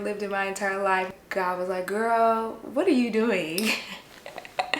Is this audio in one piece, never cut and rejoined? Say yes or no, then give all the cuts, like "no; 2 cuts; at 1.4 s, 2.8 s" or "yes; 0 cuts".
no; 1 cut; at 1.1 s